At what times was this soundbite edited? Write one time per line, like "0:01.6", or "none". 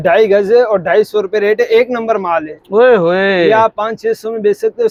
none